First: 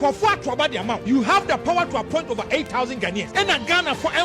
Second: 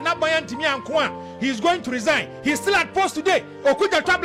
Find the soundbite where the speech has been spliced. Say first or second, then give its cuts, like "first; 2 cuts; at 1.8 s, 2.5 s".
first; 2 cuts; at 1.0 s, 3.2 s